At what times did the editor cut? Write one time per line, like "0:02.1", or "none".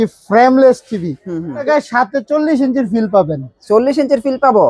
0:01.6